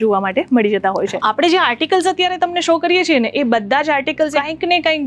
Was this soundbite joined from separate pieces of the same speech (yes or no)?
yes